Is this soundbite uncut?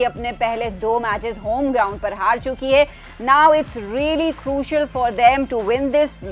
yes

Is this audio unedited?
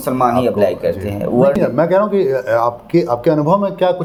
yes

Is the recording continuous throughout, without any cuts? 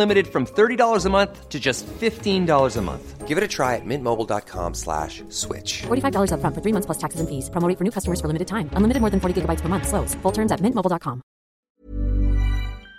no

